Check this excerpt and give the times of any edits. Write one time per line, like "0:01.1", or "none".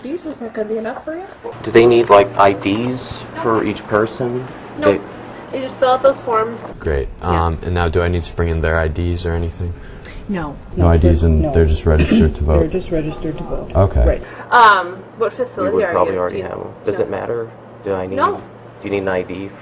0:01.6
0:06.7
0:10.6
0:14.3